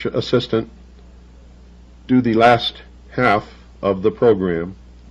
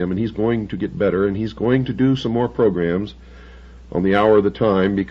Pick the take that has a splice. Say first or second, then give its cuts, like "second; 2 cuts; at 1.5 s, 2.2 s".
second; 1 cut; at 1.9 s